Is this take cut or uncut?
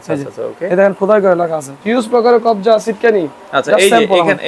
cut